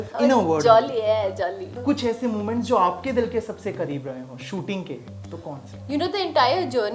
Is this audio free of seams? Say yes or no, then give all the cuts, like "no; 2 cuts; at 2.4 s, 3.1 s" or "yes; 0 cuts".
no; 2 cuts; at 1.8 s, 5.7 s